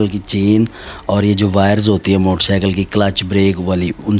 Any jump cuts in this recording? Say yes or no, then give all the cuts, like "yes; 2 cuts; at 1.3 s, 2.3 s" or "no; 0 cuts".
no; 0 cuts